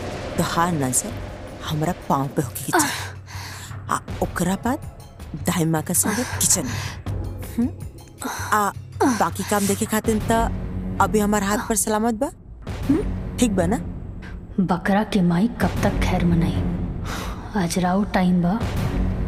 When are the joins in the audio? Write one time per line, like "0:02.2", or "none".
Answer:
none